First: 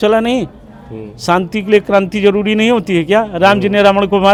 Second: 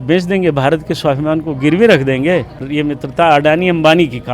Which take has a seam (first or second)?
second